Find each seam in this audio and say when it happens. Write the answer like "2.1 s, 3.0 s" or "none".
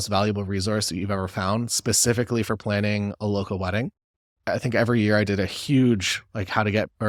none